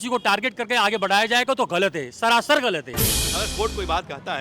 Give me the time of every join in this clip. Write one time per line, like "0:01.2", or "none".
0:03.3